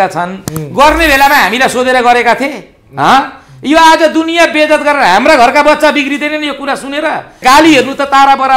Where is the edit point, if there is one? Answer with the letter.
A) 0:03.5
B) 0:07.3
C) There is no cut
B